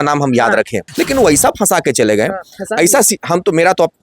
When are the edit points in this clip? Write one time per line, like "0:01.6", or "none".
0:00.9